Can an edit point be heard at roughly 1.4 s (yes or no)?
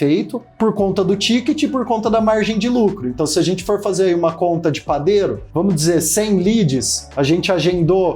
no